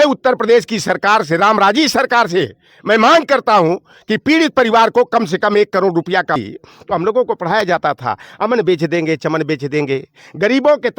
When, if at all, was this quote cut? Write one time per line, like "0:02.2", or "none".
0:06.4